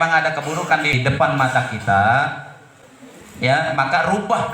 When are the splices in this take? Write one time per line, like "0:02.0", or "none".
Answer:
0:01.0

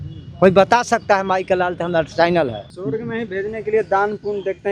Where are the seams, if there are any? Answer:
0:02.7

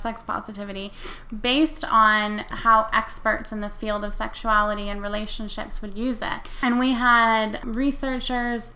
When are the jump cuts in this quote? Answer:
0:02.5
0:06.5
0:07.6

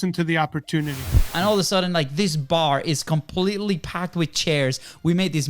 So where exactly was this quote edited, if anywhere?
0:01.2

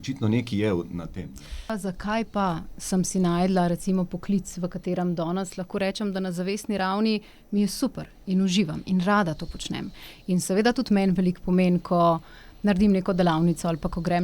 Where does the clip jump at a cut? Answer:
0:01.7

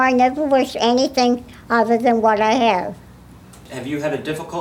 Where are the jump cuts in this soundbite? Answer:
0:03.7

